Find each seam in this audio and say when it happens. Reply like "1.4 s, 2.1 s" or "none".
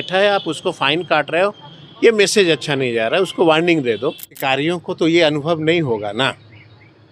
4.4 s